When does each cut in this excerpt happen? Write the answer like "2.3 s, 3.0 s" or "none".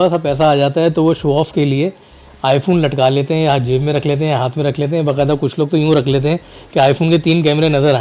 none